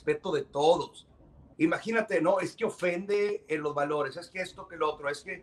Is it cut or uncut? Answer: cut